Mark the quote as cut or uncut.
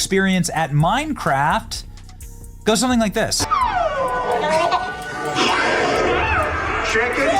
cut